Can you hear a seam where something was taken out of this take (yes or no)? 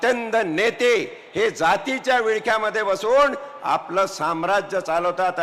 no